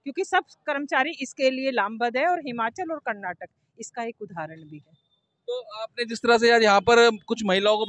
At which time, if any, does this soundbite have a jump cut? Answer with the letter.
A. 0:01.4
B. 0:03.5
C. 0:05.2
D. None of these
D